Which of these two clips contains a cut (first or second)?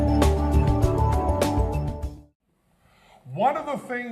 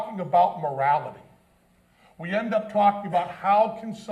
first